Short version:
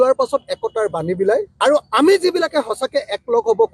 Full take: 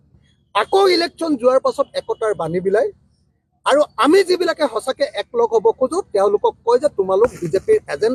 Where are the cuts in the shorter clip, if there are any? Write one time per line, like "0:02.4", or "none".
0:01.5